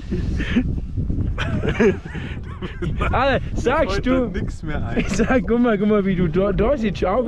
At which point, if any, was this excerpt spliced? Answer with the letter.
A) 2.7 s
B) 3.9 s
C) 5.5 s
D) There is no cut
D